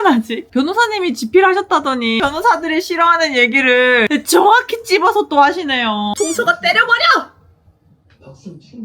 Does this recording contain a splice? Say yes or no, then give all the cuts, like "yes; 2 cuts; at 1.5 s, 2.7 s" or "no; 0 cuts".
yes; 3 cuts; at 2.2 s, 4.1 s, 6.1 s